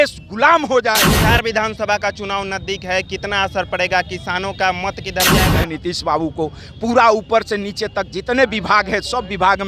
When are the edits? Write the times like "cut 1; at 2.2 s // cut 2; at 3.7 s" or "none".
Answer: cut 1; at 1.1 s // cut 2; at 5.5 s

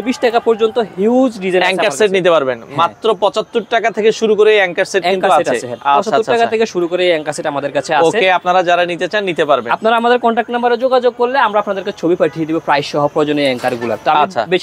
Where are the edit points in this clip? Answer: none

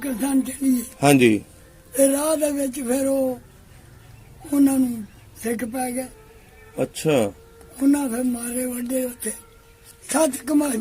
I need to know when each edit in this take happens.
cut 1; at 9.8 s

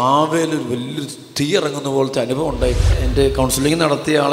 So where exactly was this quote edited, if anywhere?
cut 1; at 2.9 s

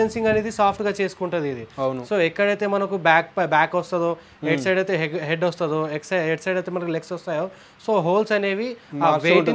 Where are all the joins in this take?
none

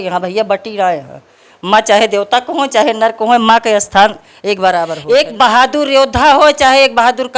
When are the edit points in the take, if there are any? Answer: cut 1; at 5.0 s

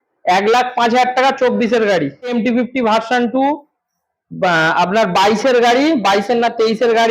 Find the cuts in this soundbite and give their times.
cut 1; at 2.3 s

